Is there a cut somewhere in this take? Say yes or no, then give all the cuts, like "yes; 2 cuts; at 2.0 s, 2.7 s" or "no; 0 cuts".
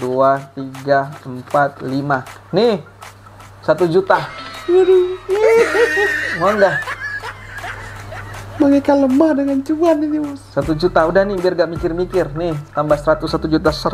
no; 0 cuts